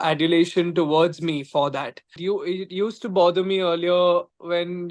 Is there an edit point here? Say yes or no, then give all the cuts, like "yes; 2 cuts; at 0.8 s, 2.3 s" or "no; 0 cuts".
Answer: yes; 1 cut; at 2.2 s